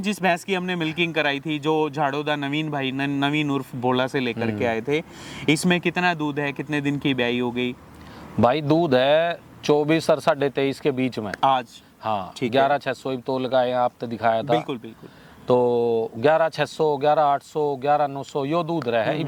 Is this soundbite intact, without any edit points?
yes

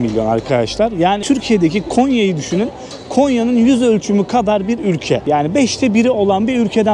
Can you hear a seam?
yes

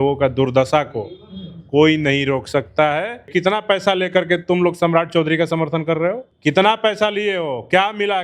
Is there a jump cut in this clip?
yes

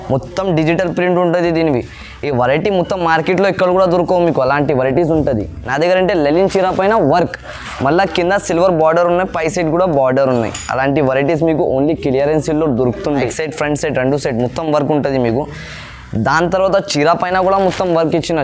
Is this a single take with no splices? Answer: no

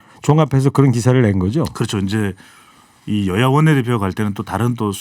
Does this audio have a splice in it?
no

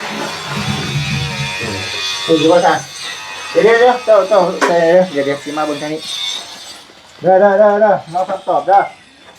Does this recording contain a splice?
no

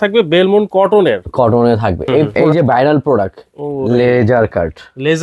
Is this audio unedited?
no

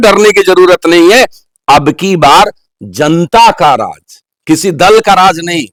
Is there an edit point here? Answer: no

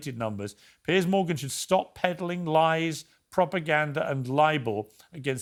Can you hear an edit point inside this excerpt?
no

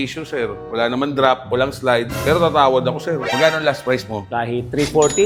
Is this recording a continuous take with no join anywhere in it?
yes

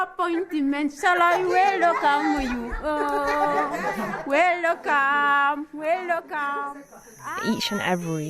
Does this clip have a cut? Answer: yes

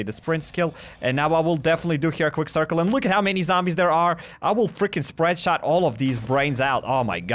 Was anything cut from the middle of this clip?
no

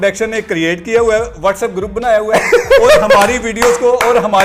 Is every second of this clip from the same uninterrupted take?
yes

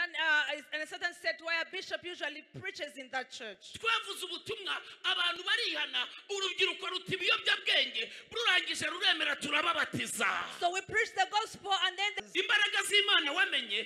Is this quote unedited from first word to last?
no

